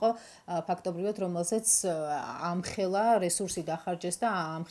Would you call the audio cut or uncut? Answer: uncut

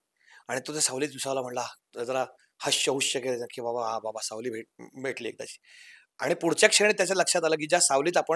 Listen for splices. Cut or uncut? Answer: uncut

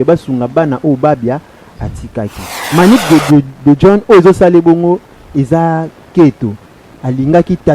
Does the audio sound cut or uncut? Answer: cut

